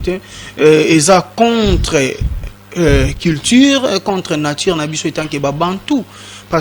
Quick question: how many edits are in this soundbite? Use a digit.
0